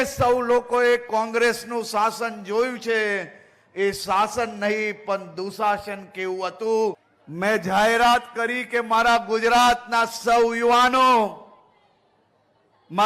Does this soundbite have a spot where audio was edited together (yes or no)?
yes